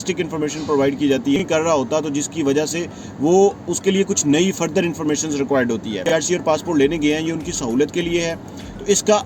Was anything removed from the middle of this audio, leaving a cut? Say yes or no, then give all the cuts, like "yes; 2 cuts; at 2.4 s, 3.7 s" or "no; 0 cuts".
yes; 2 cuts; at 1.4 s, 6.0 s